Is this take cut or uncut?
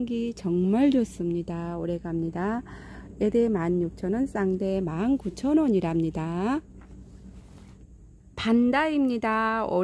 cut